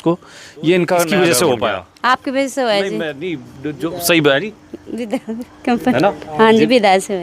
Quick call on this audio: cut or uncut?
cut